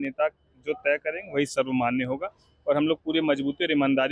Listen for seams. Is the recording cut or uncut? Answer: uncut